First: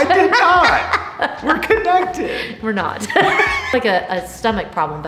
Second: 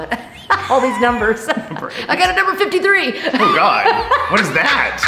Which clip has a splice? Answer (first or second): first